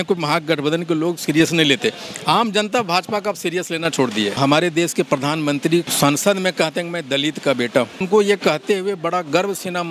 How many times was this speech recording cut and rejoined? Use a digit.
3